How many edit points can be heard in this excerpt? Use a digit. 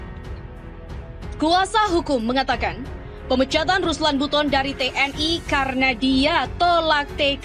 1